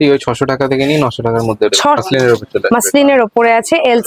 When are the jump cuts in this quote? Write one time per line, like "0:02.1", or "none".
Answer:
0:02.0